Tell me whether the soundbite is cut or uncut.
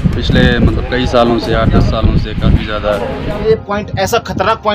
cut